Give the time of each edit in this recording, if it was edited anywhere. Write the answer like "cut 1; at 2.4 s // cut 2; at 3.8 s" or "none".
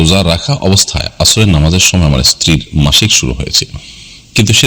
none

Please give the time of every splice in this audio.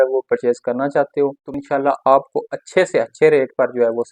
cut 1; at 1.5 s

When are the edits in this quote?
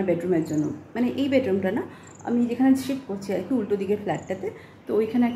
none

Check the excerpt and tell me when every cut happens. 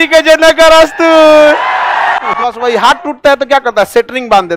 cut 1; at 2.6 s

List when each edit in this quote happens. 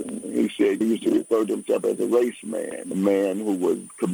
none

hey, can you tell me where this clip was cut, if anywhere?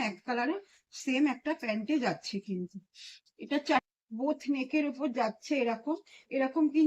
cut 1; at 4.1 s

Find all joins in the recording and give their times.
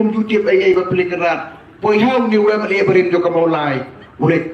none

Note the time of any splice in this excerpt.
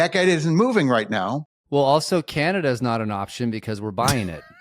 cut 1; at 1.7 s

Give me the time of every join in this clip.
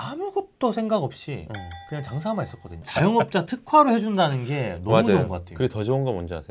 cut 1; at 2.8 s

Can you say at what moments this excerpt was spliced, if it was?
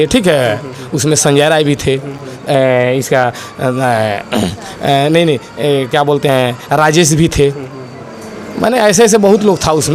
none

